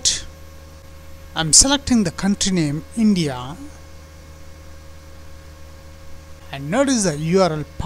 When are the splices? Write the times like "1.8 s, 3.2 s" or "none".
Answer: 6.4 s

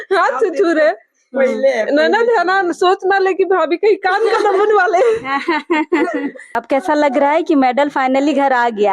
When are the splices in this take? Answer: 6.5 s

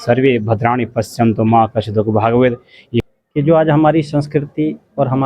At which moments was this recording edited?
3.0 s

